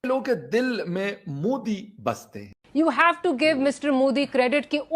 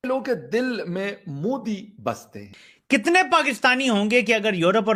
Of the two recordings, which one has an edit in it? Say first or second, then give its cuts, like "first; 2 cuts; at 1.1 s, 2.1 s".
first; 1 cut; at 2.6 s